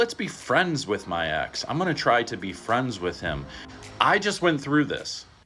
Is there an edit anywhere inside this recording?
no; 0 cuts

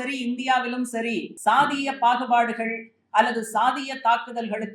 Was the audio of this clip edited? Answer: yes; 1 cut; at 1.3 s

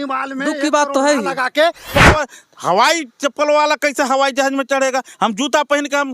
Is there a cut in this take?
yes; 1 cut; at 2.1 s

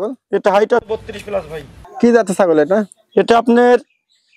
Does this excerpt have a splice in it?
yes; 1 cut; at 1.8 s

